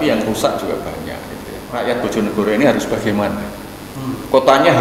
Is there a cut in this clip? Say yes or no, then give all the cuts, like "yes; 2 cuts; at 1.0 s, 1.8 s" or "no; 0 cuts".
yes; 1 cut; at 1.7 s